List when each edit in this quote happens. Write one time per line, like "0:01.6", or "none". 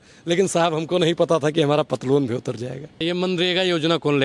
0:03.0